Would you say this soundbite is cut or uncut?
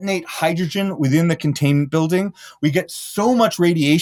uncut